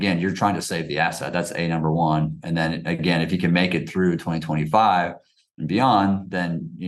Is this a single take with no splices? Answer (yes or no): yes